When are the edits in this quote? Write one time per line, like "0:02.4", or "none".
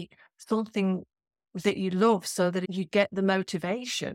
0:02.7